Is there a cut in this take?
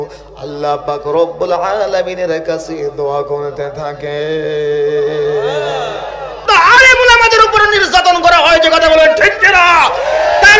yes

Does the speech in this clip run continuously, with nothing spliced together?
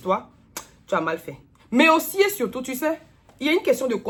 yes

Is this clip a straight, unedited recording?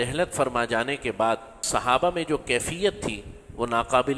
no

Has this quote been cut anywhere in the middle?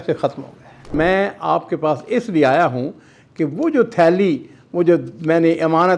yes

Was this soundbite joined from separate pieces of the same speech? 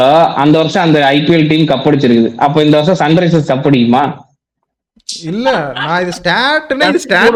no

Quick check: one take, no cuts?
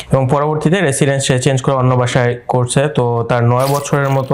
yes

